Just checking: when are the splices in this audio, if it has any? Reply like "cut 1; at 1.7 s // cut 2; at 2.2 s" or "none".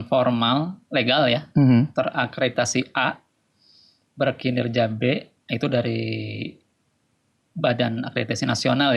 none